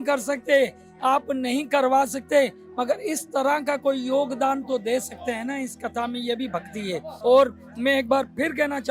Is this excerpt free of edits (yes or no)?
no